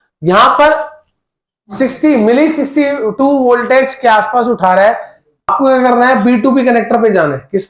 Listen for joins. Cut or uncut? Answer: cut